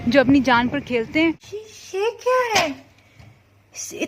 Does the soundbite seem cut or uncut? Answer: cut